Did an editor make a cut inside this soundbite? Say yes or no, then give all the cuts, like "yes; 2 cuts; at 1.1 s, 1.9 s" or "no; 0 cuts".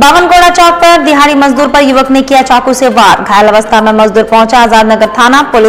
no; 0 cuts